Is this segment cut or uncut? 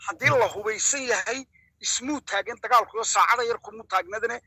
uncut